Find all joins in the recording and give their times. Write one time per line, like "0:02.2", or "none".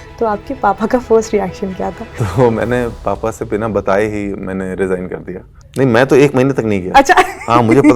0:02.1
0:05.6